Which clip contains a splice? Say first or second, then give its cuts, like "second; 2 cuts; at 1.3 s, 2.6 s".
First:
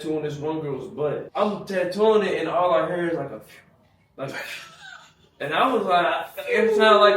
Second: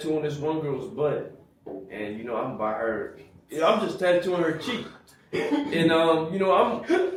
first; 1 cut; at 1.2 s